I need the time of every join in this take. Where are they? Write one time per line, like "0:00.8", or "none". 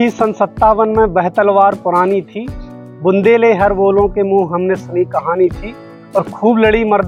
none